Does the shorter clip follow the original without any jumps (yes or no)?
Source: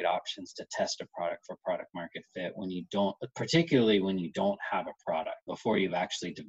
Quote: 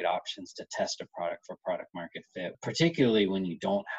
no